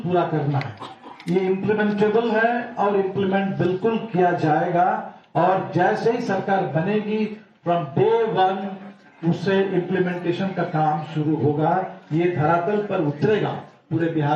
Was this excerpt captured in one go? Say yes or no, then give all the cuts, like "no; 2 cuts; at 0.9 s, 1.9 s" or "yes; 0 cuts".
no; 1 cut; at 13.3 s